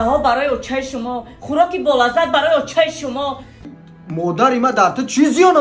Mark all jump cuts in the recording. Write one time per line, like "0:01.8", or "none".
0:03.6